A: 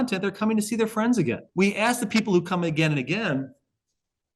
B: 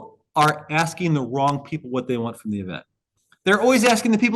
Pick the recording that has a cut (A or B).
A